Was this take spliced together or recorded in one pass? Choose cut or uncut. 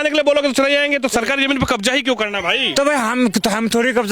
uncut